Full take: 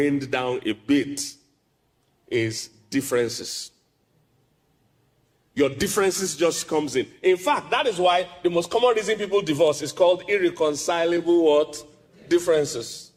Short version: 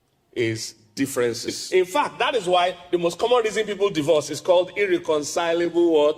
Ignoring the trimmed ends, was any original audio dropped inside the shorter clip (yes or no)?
yes